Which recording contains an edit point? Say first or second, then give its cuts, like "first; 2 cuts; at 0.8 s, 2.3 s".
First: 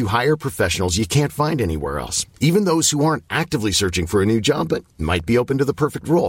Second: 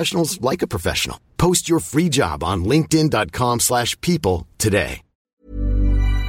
second; 1 cut; at 5.4 s